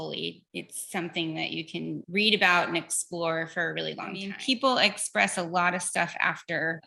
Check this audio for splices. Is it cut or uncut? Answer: cut